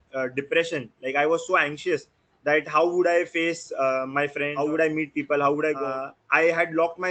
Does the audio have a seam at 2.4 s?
no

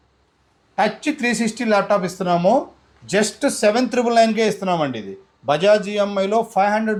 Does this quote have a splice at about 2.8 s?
no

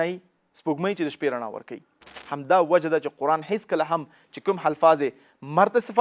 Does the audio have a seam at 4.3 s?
no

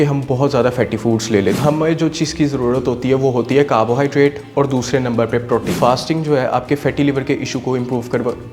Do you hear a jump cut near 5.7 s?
yes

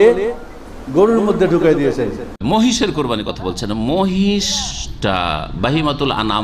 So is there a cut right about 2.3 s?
yes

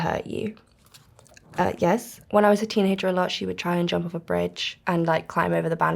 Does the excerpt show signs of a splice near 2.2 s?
yes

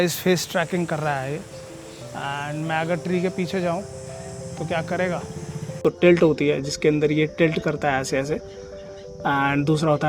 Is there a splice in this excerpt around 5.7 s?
yes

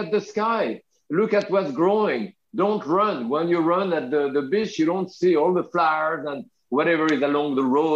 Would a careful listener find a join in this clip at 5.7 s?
no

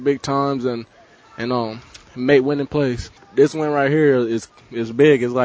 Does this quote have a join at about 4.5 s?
no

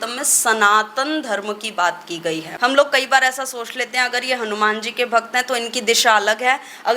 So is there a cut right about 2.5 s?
yes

